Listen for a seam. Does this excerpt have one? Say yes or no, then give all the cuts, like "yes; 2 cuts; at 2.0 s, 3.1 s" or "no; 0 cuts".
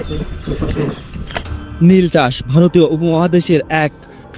yes; 1 cut; at 1.5 s